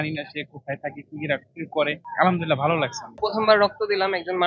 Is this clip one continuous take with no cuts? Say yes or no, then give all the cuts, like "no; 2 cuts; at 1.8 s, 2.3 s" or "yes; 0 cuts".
no; 2 cuts; at 2.0 s, 3.2 s